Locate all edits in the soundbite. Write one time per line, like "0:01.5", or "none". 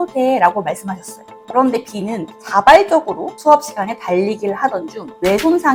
none